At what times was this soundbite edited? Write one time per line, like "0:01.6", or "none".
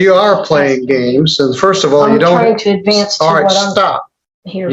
none